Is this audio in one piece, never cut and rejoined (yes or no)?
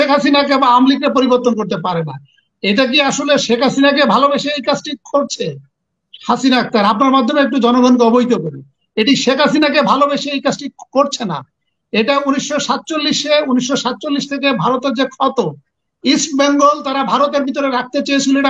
yes